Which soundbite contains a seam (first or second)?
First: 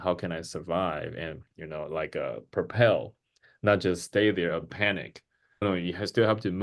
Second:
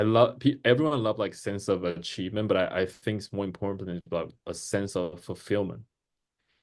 first